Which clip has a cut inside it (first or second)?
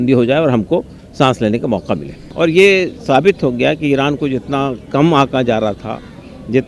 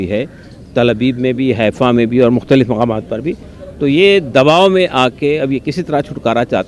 first